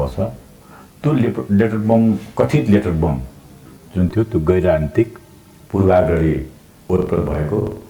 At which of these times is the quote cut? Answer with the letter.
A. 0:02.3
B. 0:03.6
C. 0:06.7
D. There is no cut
D